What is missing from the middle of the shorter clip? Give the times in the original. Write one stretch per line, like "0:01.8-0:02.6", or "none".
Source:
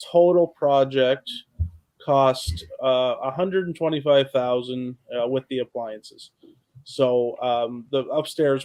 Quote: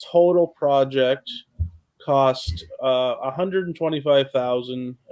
none